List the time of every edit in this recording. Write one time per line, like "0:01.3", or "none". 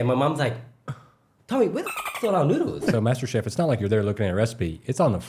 0:02.9